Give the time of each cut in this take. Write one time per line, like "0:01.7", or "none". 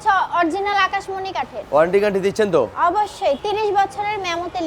none